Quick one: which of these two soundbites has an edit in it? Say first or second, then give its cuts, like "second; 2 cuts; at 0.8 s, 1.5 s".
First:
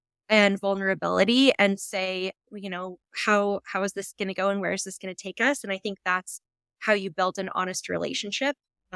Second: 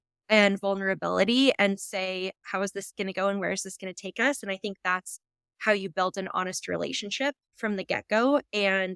second; 2 cuts; at 2.5 s, 7.5 s